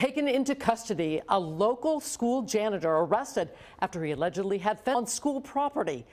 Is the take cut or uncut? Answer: cut